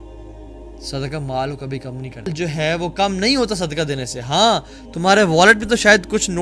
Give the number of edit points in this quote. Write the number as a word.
two